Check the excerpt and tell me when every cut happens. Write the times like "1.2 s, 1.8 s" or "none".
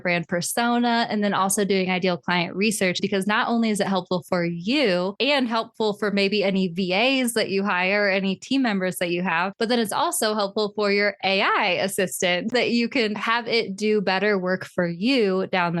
12.5 s

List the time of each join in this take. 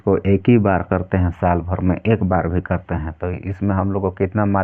none

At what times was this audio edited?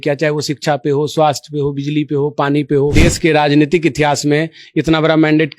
2.9 s

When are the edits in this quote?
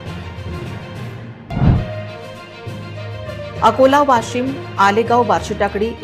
none

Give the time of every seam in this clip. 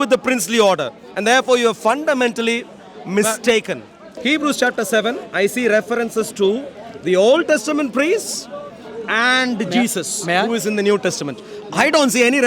4.0 s

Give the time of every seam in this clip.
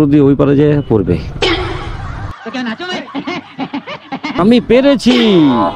4.4 s

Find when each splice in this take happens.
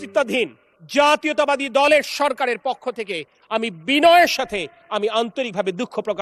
none

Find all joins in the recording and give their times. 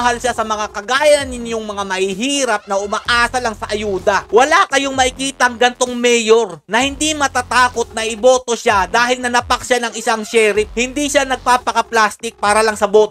4.3 s

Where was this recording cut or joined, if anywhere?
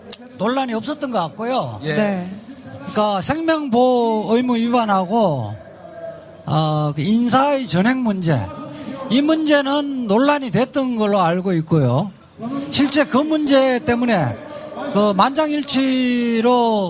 none

